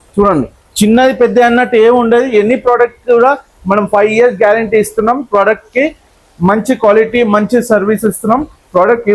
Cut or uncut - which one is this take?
uncut